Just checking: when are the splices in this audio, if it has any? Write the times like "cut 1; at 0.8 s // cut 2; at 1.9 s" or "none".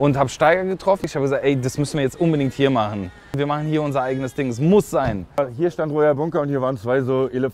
cut 1; at 1.1 s // cut 2; at 3.3 s // cut 3; at 5.4 s